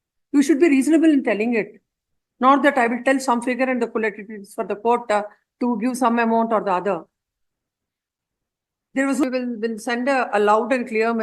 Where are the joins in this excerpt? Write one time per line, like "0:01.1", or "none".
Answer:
0:09.2